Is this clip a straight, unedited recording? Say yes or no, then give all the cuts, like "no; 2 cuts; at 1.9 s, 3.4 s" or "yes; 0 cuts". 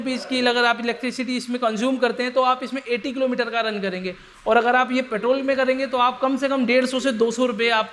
yes; 0 cuts